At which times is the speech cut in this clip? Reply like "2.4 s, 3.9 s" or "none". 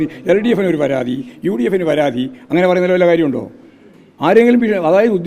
none